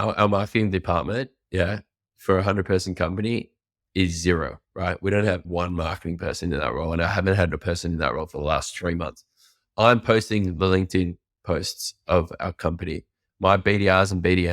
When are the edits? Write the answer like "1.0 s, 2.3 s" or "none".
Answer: none